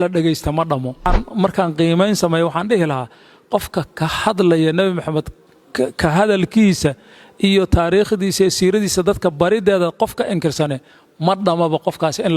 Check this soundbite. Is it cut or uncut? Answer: cut